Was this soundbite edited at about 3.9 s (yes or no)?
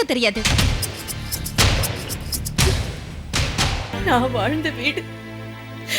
yes